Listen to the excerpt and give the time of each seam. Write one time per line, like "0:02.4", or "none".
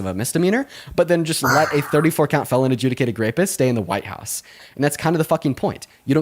0:04.6

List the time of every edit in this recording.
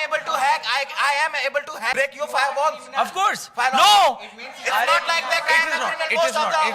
0:01.9

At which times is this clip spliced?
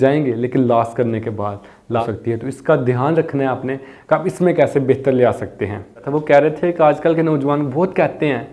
0:02.0
0:06.1

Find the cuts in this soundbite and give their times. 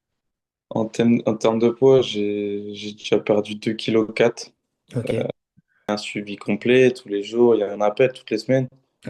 0:05.9

